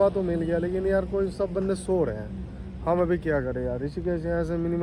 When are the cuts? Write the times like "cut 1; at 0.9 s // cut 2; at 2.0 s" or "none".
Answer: none